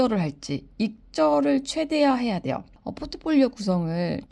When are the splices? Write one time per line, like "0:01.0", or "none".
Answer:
0:02.8